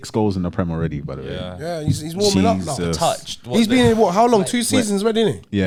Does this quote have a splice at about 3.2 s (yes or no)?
no